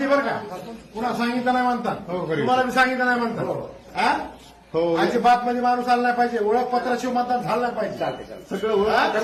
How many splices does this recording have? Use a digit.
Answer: 0